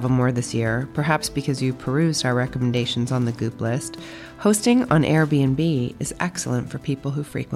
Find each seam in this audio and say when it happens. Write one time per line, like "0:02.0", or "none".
none